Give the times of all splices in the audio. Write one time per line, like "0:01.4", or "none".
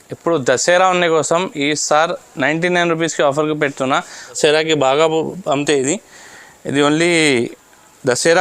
0:04.4